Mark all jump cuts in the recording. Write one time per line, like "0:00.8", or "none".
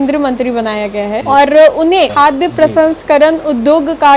none